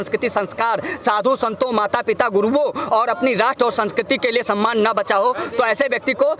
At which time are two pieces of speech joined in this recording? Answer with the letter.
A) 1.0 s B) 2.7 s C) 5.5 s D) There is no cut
D